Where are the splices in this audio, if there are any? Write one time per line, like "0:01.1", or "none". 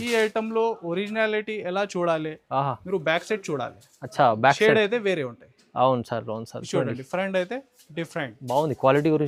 none